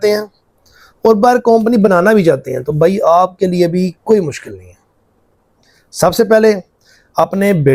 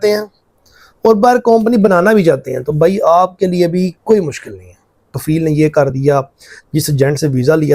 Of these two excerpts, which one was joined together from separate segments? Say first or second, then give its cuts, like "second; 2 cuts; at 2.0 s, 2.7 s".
second; 1 cut; at 5.1 s